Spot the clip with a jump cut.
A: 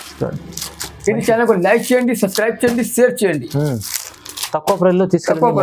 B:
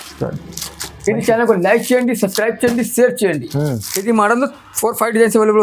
B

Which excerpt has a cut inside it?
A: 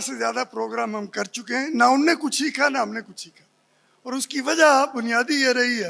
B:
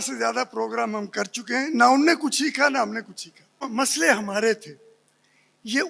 B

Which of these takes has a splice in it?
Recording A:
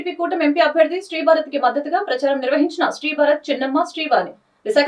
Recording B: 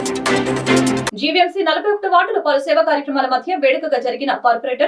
B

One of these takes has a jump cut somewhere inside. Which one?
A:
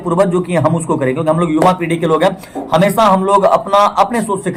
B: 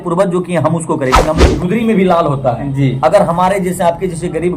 B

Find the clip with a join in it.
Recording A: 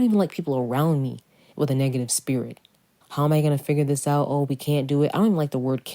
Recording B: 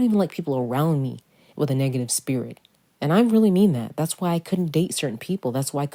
A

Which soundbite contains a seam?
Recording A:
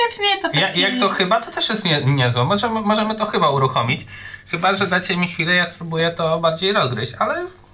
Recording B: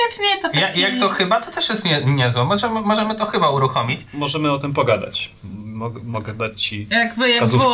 B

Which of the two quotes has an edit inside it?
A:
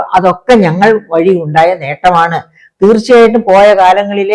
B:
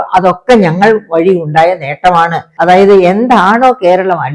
B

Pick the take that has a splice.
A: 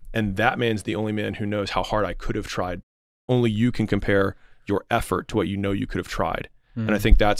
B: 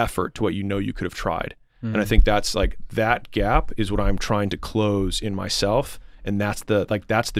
A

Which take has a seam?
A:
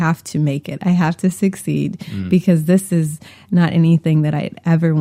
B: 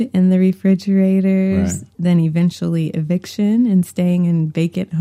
B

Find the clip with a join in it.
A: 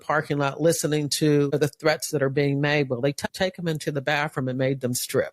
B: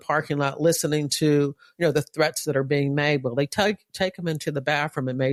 A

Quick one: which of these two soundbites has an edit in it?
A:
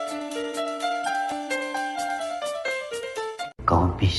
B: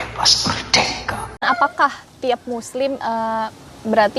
B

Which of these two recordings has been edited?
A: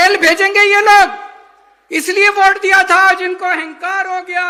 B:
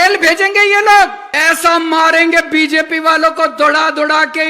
B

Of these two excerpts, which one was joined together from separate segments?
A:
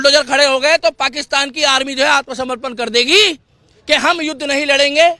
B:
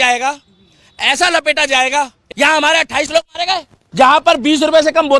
B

